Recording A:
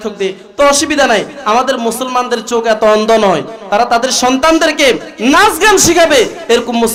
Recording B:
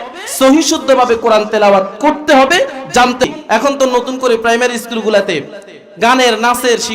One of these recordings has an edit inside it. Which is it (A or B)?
B